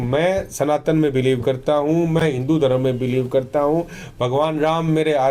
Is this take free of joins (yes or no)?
yes